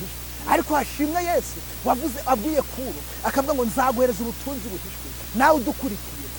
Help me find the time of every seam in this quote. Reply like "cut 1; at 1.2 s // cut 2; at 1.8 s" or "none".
none